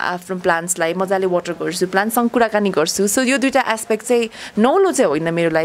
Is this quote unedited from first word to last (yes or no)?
yes